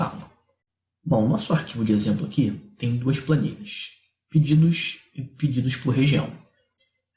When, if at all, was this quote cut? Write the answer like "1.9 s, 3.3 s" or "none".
5.5 s